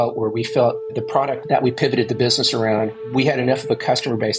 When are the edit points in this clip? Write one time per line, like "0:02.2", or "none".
0:01.1
0:03.0